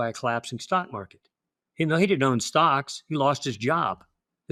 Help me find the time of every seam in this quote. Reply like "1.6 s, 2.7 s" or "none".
none